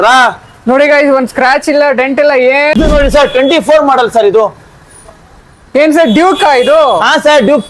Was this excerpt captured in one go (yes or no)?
no